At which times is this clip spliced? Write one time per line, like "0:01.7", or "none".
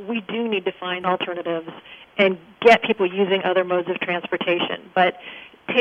0:01.0